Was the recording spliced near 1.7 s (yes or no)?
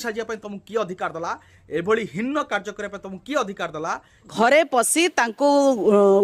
no